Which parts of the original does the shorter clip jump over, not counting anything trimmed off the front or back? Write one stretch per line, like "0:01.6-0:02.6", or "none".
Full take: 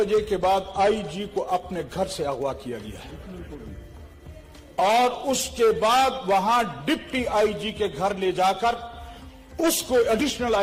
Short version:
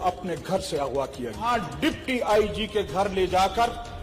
0:02.9-0:06.5